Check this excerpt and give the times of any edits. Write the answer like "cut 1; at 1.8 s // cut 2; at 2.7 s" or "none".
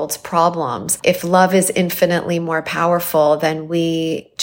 cut 1; at 0.9 s